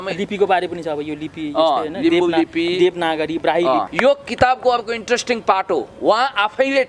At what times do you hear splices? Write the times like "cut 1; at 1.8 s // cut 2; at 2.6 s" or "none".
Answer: cut 1; at 3.9 s